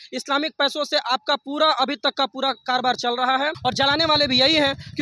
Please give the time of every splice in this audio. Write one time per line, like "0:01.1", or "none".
0:03.6